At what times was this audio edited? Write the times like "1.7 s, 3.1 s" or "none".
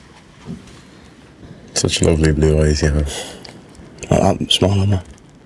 1.4 s